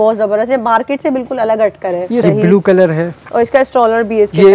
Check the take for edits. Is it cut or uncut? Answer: cut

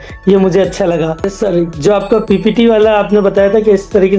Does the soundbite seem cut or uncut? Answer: cut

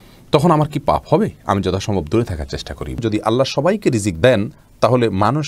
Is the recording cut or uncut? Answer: cut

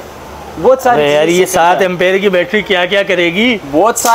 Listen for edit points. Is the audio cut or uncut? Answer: uncut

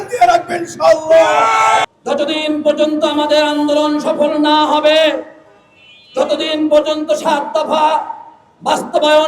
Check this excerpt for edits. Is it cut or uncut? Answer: cut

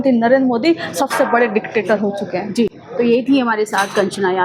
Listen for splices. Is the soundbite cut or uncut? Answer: uncut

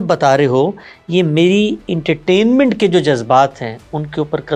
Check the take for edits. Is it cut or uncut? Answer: uncut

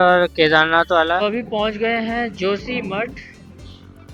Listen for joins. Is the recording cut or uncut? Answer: cut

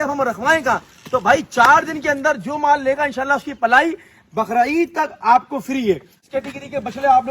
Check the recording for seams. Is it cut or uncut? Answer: cut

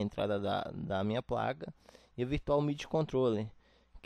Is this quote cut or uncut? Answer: uncut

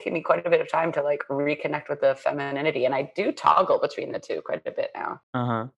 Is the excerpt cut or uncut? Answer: uncut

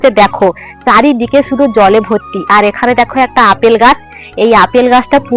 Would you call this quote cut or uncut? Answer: uncut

